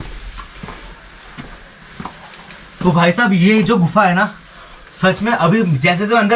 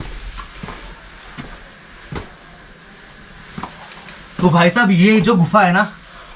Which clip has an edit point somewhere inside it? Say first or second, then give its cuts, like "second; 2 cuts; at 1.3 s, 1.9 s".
first; 1 cut; at 1.8 s